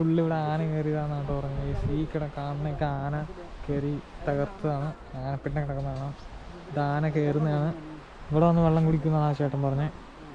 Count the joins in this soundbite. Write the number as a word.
zero